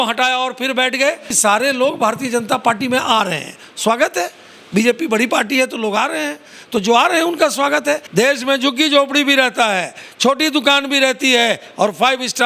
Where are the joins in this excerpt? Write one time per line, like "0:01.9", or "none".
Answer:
0:01.3
0:08.0